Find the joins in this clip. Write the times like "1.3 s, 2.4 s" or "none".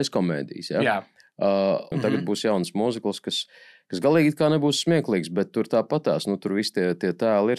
1.9 s